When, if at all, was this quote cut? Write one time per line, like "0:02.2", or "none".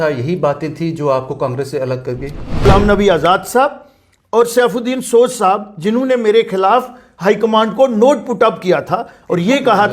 0:02.7